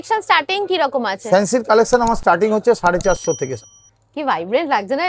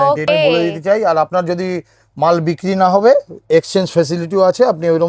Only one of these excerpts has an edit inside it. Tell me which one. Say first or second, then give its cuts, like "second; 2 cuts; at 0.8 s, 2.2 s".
first; 1 cut; at 3.6 s